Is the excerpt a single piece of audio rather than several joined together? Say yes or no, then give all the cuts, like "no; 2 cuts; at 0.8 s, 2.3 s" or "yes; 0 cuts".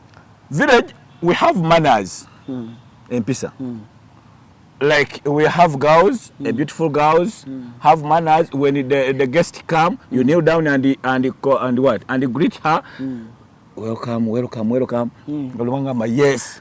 yes; 0 cuts